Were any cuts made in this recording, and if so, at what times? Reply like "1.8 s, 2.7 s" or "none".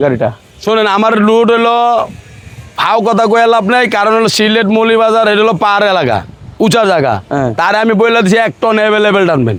none

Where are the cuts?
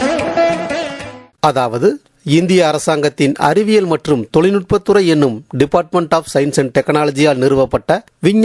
1.2 s

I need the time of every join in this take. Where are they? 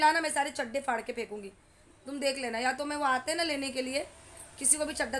none

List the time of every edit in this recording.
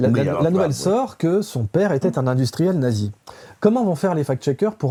none

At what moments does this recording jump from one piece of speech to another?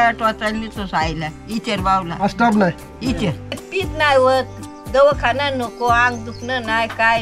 3.5 s

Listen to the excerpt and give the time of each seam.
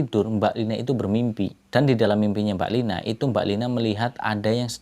1.6 s

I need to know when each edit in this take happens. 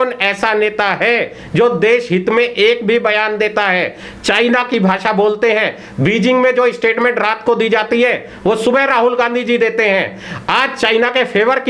none

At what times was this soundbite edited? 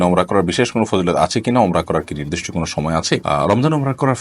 none

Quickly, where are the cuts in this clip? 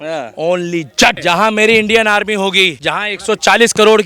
1.2 s, 2.8 s

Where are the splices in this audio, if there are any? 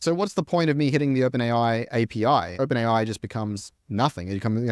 2.5 s

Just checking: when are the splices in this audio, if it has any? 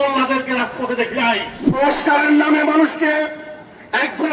1.8 s

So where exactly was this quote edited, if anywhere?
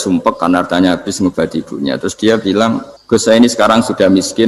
2.9 s

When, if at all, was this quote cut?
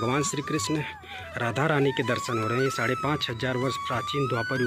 none

